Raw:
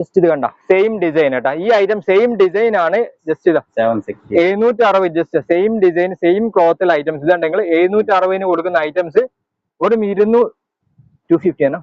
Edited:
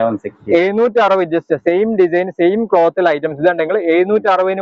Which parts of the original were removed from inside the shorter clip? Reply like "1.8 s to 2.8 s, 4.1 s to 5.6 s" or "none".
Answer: none